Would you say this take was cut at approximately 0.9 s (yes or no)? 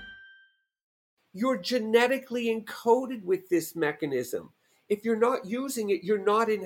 yes